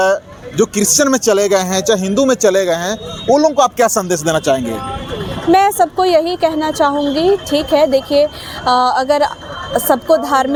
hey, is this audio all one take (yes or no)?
yes